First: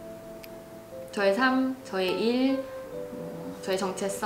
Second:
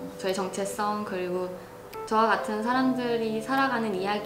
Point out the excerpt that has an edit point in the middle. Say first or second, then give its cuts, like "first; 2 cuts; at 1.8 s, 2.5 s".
second; 1 cut; at 1.9 s